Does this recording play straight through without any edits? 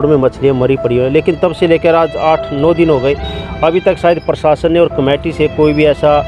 yes; 0 cuts

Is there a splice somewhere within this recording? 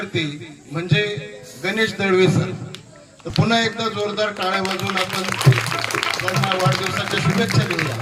no; 0 cuts

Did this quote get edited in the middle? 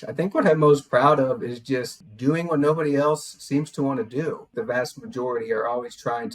yes; 2 cuts; at 1.9 s, 4.5 s

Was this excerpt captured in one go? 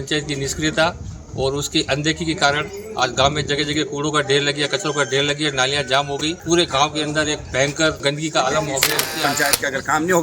no; 3 cuts; at 6.4 s, 8.0 s, 9.3 s

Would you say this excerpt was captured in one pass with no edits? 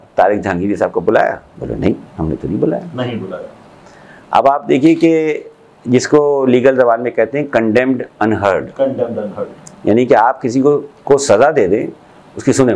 yes; 0 cuts

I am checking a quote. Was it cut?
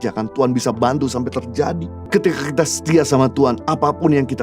yes; 1 cut; at 1.9 s

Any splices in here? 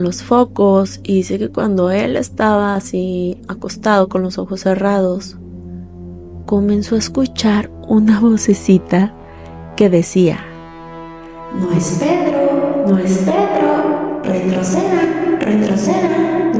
no; 0 cuts

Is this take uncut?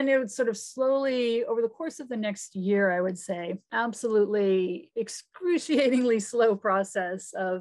no; 1 cut; at 3.7 s

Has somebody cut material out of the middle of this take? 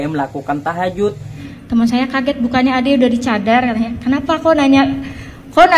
yes; 1 cut; at 1.3 s

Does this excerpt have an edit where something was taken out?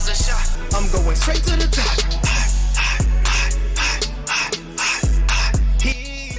no; 0 cuts

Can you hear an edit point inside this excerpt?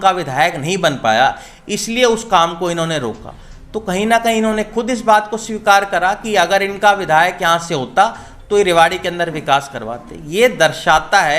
no; 0 cuts

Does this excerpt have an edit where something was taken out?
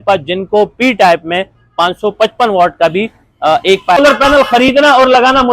yes; 1 cut; at 4.0 s

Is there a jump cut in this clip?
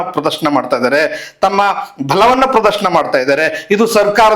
no; 0 cuts

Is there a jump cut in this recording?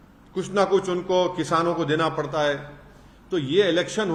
no; 0 cuts

